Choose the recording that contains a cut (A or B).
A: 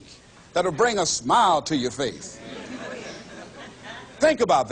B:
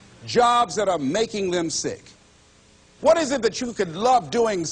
B